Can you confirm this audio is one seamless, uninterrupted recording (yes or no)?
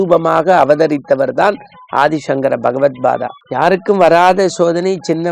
no